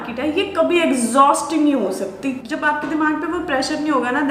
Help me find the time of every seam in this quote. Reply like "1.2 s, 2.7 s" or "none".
2.4 s